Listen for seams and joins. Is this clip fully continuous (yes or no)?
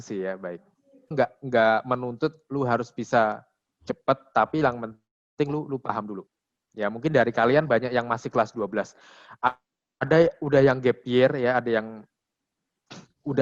no